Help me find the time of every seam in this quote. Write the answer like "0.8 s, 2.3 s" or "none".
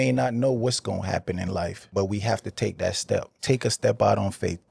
1.8 s, 3.3 s